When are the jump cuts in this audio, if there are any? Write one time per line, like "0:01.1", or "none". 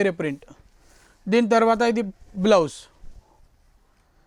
none